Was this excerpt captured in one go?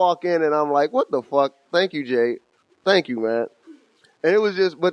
no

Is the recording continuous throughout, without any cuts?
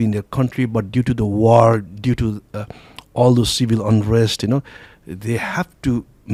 yes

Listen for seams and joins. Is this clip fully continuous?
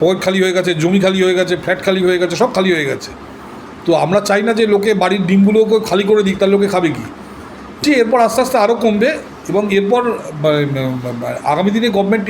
no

